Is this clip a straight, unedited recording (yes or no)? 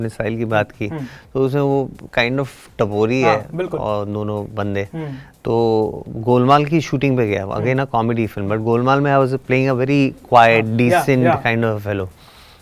yes